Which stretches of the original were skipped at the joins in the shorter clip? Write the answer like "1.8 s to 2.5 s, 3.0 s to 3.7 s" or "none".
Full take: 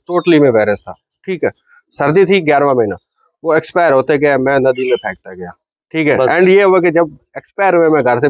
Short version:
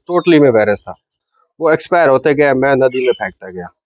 1.2 s to 3.0 s